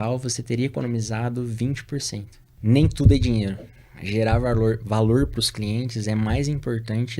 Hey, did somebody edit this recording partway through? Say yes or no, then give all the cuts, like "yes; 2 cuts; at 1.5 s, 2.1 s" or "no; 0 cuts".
yes; 1 cut; at 2.4 s